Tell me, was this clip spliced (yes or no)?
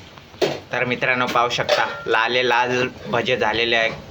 no